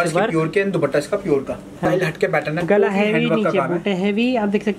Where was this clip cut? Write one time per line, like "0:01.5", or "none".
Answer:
0:01.8